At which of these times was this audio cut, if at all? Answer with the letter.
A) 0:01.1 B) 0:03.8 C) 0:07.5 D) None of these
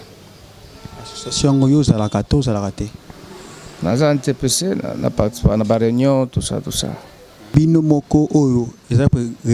C